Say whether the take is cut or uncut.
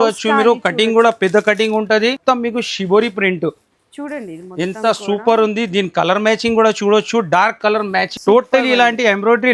cut